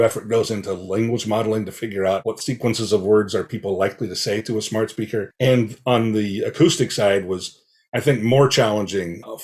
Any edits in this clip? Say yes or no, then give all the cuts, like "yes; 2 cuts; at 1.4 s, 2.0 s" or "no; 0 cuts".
yes; 1 cut; at 5.3 s